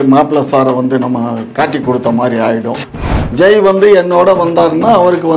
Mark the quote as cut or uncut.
cut